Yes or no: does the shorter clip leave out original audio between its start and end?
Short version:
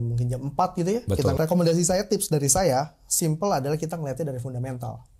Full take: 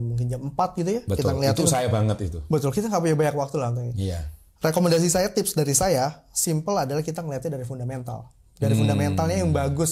yes